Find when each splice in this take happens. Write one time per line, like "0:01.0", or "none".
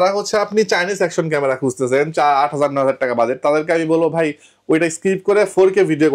none